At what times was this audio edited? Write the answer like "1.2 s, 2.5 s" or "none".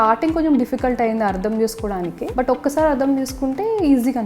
2.2 s